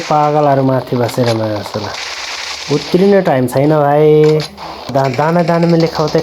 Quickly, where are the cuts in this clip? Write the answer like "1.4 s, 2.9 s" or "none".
4.9 s